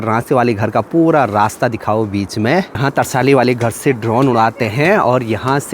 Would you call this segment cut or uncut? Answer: cut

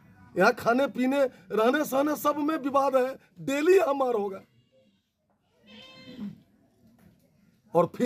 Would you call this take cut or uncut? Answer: uncut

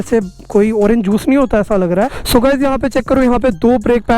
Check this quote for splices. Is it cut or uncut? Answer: cut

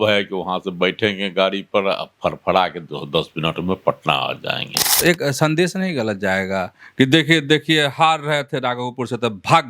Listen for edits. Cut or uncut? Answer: cut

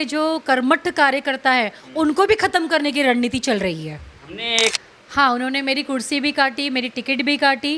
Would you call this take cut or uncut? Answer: cut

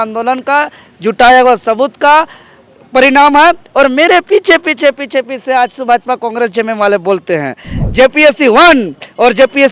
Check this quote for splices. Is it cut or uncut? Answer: cut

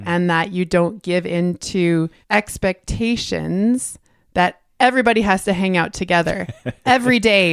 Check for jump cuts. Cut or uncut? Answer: cut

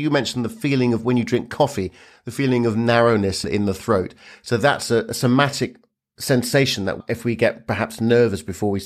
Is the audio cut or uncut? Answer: cut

